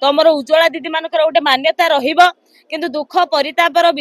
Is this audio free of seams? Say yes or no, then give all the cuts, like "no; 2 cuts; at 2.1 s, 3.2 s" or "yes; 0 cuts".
yes; 0 cuts